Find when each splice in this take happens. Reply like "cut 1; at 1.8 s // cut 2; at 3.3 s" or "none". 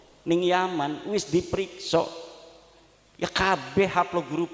none